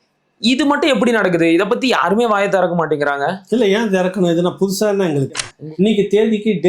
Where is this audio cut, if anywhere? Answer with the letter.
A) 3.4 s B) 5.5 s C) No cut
B